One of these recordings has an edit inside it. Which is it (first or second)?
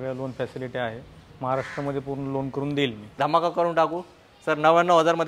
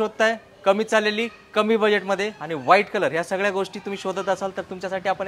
first